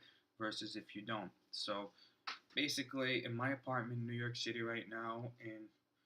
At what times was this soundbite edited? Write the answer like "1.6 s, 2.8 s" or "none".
3.2 s